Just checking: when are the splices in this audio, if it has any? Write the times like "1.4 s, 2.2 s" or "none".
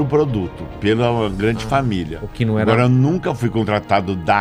none